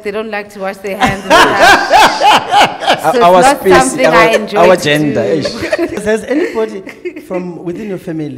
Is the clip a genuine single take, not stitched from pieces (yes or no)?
no